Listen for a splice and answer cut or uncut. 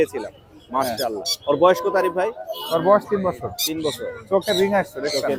uncut